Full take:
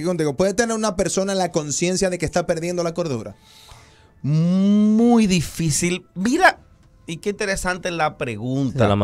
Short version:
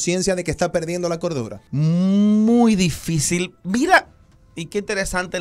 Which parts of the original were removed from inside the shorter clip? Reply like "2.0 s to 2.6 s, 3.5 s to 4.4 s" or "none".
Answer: 3.3 s to 4.1 s